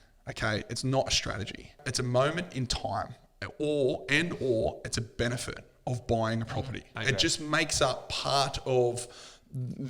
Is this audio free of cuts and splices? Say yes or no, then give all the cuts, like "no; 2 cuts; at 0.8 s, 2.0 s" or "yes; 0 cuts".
no; 2 cuts; at 1.8 s, 6.9 s